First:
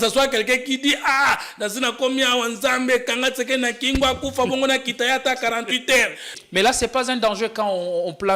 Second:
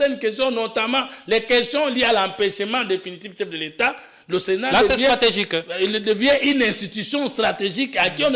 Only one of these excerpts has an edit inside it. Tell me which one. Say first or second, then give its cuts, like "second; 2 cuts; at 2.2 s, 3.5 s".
first; 1 cut; at 6.3 s